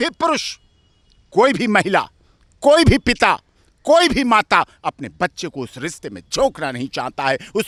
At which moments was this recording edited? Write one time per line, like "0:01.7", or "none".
none